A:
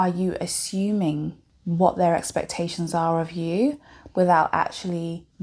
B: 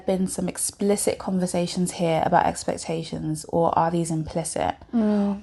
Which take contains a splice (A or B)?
A